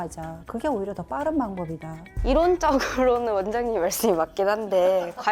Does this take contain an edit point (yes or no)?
no